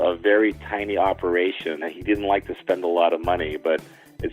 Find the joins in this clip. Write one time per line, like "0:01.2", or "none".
0:01.9